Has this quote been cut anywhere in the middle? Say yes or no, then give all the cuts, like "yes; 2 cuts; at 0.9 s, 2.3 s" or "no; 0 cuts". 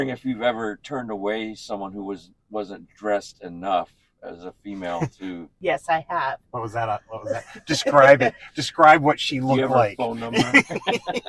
yes; 1 cut; at 5.5 s